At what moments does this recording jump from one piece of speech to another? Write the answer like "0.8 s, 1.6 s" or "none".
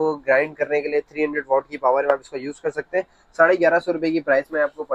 none